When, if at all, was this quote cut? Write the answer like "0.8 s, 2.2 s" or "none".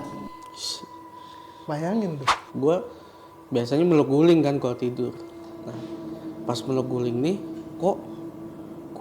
2.5 s